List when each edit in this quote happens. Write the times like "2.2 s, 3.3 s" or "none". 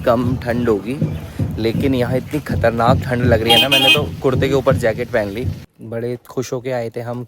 5.7 s